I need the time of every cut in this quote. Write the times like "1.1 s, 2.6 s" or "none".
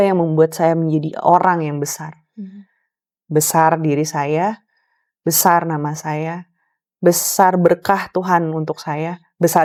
none